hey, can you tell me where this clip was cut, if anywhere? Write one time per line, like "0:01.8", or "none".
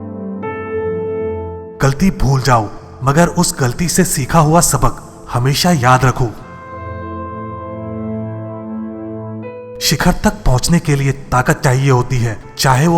0:01.3